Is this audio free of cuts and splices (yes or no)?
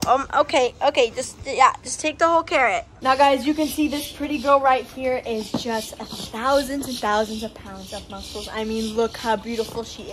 yes